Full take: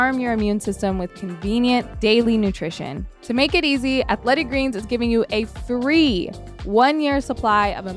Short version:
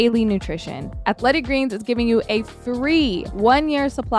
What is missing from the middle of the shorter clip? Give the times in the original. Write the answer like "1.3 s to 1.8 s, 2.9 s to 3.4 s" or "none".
3.2 s to 4.1 s, 6.3 s to 6.6 s